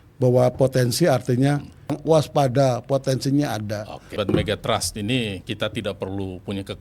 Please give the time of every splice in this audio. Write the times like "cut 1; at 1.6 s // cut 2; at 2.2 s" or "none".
cut 1; at 2.0 s // cut 2; at 4.1 s